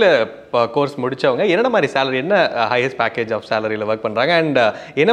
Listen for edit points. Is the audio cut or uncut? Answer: uncut